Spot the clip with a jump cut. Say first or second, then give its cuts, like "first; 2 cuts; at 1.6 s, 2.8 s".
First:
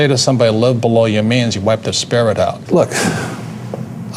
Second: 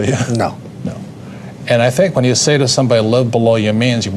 first; 1 cut; at 2.6 s